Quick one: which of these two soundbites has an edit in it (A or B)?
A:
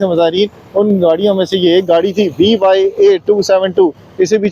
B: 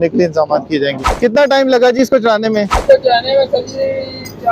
B